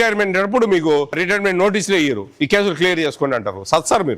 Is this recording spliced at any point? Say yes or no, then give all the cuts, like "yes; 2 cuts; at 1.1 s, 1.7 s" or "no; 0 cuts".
yes; 1 cut; at 1.2 s